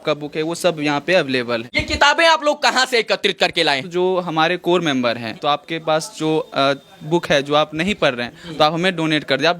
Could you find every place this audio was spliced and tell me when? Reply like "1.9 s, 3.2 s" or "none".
1.7 s, 3.9 s, 5.4 s